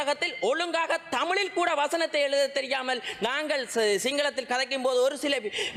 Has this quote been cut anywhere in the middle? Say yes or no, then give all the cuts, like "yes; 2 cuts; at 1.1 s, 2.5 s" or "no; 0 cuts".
no; 0 cuts